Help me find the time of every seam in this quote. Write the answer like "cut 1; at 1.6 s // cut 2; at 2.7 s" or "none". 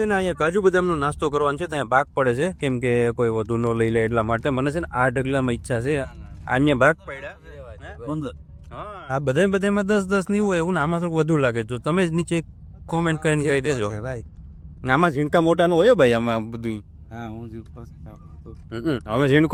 none